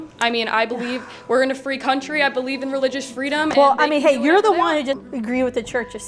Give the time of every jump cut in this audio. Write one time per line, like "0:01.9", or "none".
0:05.0